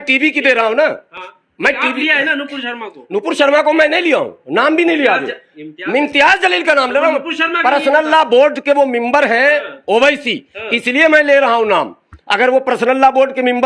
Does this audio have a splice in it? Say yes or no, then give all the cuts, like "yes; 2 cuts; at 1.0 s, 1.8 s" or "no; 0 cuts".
no; 0 cuts